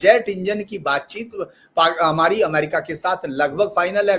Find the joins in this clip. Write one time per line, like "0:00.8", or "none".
none